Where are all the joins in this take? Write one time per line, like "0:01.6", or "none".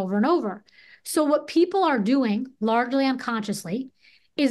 none